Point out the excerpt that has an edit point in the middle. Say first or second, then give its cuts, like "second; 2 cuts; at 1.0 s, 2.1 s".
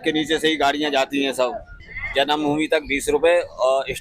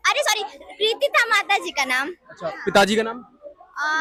first; 1 cut; at 1.7 s